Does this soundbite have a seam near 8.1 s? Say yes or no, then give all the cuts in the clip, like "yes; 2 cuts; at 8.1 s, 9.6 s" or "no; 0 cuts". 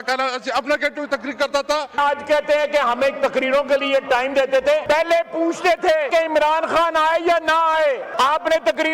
yes; 4 cuts; at 2.0 s, 4.8 s, 6.1 s, 8.1 s